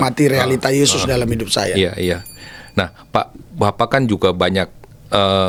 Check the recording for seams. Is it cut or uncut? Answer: uncut